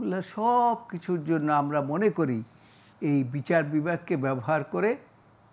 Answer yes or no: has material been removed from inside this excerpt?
no